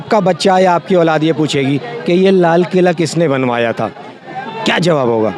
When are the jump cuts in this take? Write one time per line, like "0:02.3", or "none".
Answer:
none

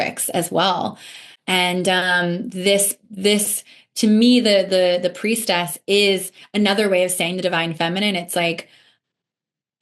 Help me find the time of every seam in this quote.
none

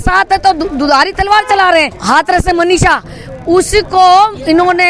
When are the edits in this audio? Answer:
0:01.9

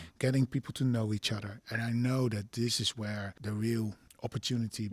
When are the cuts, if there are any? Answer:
0:03.3
0:04.1

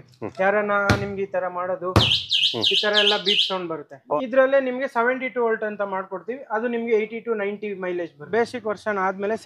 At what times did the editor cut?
0:04.2
0:08.2

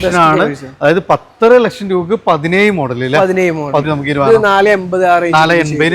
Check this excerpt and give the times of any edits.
0:03.9

